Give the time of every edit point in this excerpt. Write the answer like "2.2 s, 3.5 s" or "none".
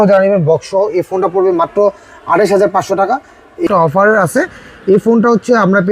3.7 s